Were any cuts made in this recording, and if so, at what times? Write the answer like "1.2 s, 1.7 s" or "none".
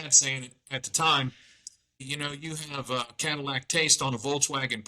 2.0 s